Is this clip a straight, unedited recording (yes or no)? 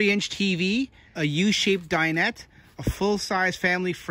no